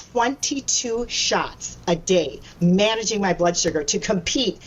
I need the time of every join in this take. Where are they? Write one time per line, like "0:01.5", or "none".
none